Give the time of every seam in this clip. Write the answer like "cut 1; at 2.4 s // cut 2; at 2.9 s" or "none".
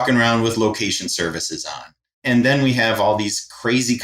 cut 1; at 2.2 s

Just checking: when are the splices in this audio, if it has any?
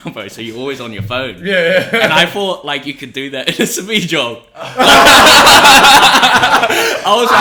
none

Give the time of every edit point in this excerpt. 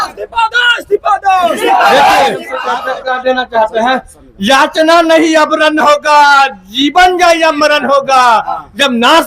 cut 1; at 2.6 s

